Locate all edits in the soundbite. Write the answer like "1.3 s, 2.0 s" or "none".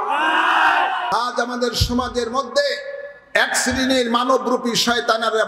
1.1 s

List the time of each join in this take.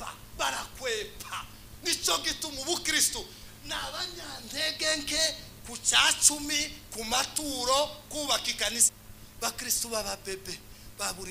9.0 s

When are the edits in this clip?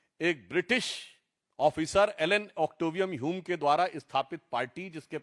none

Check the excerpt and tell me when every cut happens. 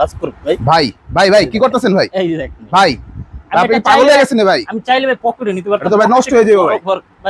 none

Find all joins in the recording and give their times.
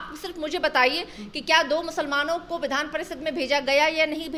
none

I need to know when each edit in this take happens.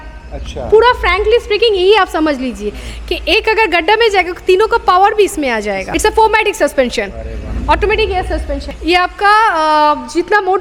none

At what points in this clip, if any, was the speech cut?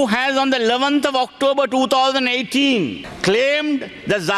3.1 s

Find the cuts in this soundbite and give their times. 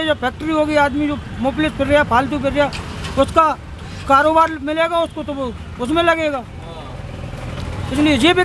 none

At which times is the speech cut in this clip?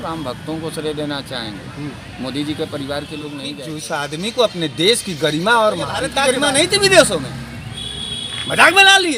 3.5 s, 6.1 s

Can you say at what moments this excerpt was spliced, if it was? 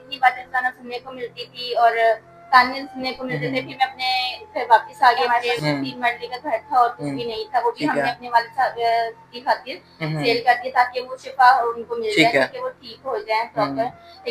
5.2 s

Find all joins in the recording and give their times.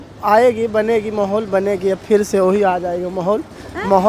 none

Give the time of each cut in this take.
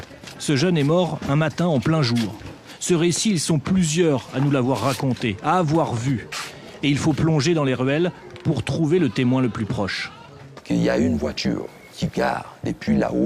none

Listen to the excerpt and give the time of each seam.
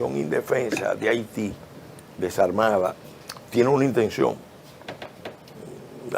none

